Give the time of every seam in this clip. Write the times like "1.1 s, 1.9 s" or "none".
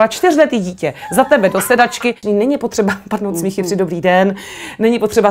2.2 s